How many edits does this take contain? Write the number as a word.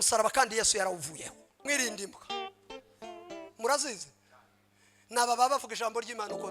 one